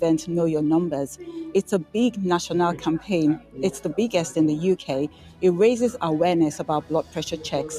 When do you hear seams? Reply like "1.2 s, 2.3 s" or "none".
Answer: none